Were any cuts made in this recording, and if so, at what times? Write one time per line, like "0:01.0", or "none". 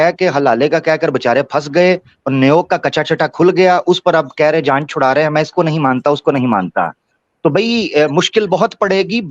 none